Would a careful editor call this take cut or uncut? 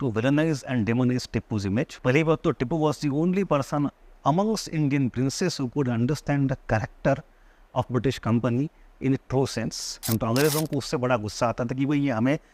cut